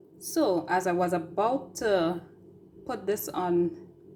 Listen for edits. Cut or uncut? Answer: uncut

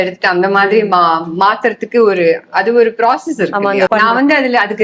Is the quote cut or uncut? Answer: cut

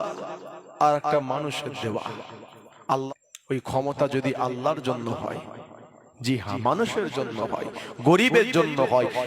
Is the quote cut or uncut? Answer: cut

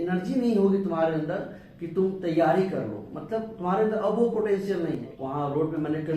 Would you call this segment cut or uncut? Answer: cut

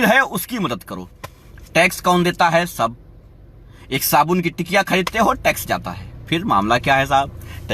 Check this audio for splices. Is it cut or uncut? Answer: uncut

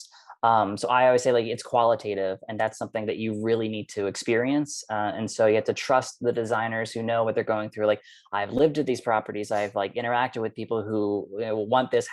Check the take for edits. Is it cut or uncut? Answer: uncut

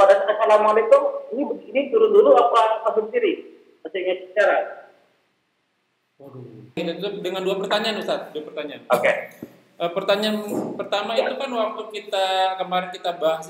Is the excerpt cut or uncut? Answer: cut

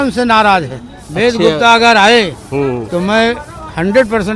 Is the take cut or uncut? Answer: uncut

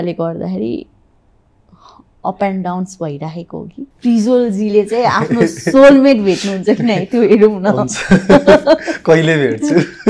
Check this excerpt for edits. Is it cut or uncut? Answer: cut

